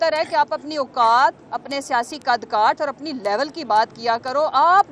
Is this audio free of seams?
yes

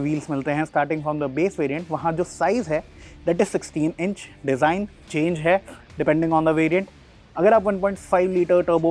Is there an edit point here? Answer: no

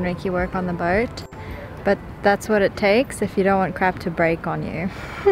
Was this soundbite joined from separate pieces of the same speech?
no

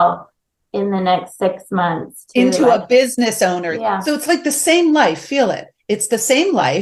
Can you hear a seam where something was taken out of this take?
yes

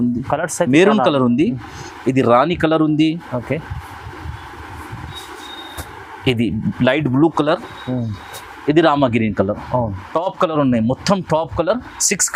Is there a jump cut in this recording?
no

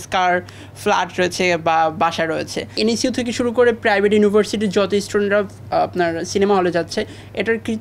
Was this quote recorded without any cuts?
no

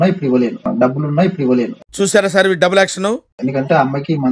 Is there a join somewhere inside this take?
no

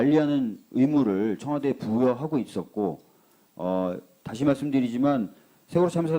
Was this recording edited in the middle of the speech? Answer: yes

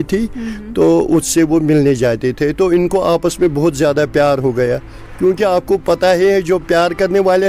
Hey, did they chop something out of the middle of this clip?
no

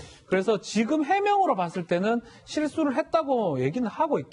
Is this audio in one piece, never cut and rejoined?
yes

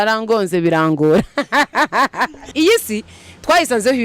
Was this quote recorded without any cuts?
no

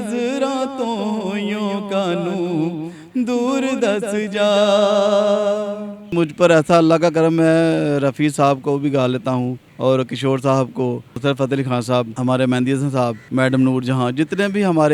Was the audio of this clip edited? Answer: yes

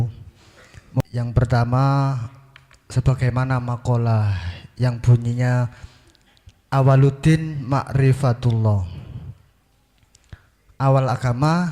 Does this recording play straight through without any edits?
no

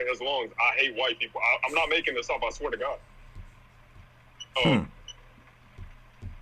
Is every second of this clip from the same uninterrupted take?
yes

